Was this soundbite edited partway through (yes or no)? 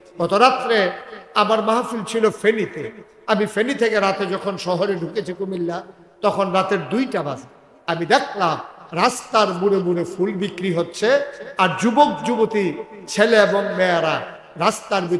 no